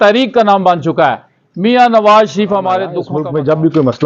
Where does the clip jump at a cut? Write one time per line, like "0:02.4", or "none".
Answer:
0:03.0